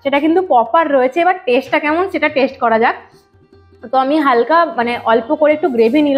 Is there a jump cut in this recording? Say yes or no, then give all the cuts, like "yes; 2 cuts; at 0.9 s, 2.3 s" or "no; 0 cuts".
no; 0 cuts